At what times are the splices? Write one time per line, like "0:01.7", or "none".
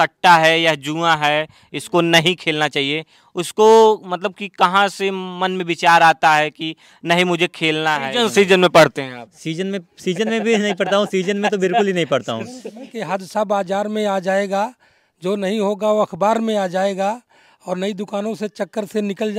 0:08.0
0:12.9

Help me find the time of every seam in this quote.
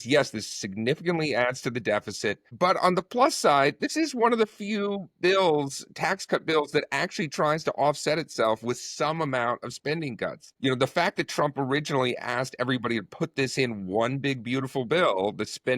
0:02.5
0:10.4

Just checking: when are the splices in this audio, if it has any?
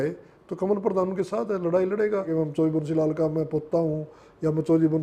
0:02.3

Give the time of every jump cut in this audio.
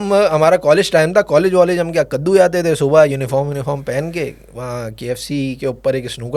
none

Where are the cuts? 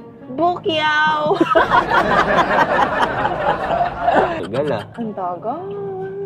0:04.4

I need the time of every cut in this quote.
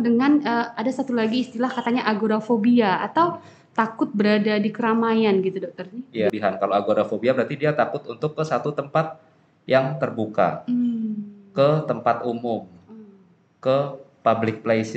0:06.3

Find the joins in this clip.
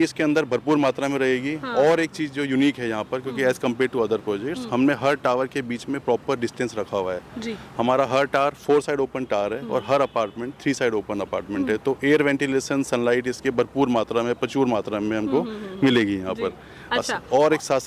none

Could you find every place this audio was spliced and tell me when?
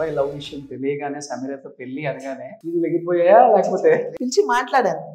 0:02.6
0:04.1

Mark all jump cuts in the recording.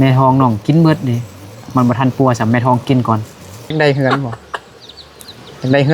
0:03.7

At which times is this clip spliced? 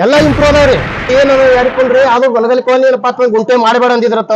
0:01.1

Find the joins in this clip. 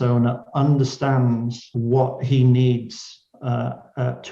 0:01.7

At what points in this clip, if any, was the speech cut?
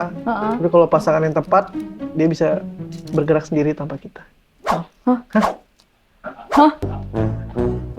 none

